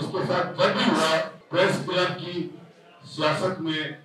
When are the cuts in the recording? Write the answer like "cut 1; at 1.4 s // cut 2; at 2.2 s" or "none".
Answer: cut 1; at 1.4 s